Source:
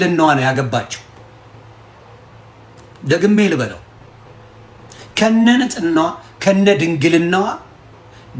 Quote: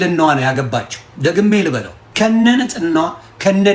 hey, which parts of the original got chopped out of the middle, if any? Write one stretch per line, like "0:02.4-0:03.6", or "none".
0:01.0-0:02.9
0:03.8-0:05.0